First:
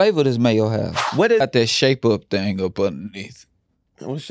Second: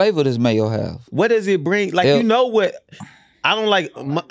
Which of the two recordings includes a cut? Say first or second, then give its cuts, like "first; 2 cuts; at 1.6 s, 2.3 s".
first; 1 cut; at 1.4 s